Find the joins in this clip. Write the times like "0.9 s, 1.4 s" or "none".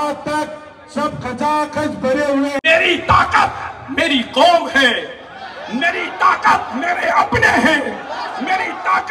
2.6 s